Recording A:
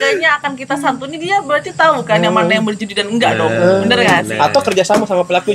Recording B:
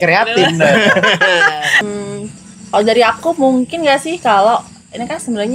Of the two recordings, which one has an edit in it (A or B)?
B